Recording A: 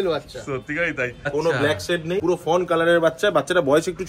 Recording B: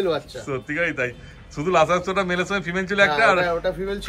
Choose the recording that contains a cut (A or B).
A